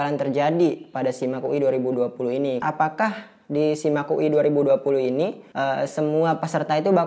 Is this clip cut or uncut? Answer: cut